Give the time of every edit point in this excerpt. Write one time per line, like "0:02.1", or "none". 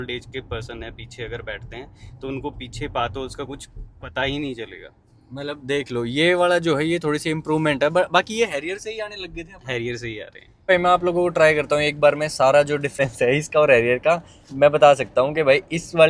none